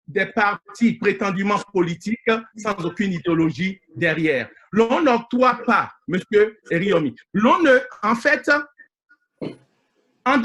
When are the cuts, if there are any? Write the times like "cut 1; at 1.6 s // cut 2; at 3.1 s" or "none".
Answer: none